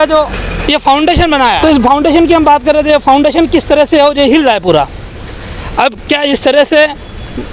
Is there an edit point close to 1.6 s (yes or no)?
yes